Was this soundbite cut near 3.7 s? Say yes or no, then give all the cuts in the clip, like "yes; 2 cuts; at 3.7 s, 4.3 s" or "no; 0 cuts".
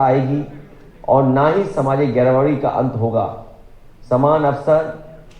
no; 0 cuts